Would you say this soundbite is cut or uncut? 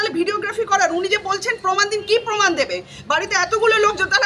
uncut